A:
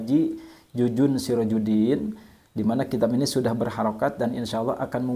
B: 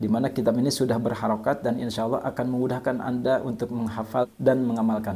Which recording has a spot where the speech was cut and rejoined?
B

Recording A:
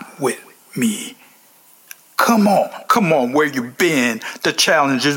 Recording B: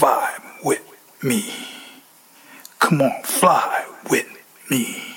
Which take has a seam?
A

